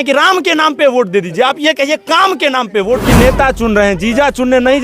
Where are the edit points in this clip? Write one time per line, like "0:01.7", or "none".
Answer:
0:03.1